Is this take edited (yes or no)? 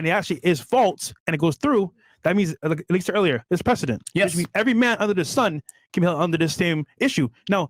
no